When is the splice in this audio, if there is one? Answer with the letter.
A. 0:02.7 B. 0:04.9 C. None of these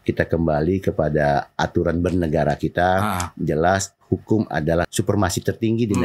B